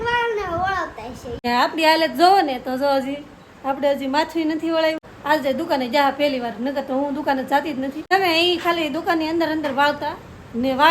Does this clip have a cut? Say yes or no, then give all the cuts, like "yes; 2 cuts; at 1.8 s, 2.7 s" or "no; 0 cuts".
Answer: yes; 3 cuts; at 1.5 s, 5.1 s, 8.2 s